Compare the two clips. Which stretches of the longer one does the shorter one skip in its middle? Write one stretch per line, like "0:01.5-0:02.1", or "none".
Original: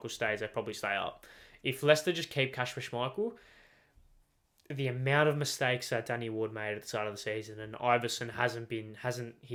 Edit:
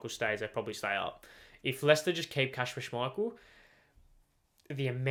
none